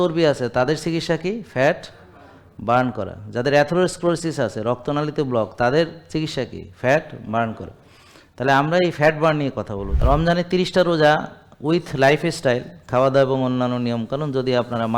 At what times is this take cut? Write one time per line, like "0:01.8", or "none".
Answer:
0:10.0